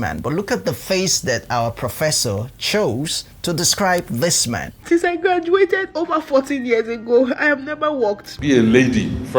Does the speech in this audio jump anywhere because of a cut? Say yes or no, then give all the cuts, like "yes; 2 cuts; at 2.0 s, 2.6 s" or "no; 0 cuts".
yes; 2 cuts; at 4.8 s, 8.3 s